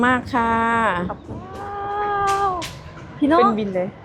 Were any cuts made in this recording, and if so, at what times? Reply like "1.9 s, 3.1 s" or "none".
1.6 s